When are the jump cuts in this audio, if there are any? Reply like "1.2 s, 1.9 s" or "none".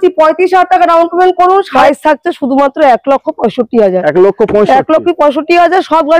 1.7 s